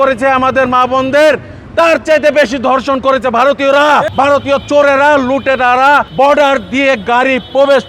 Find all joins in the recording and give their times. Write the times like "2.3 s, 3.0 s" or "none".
4.1 s, 6.1 s